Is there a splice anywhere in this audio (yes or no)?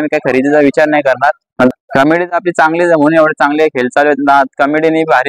yes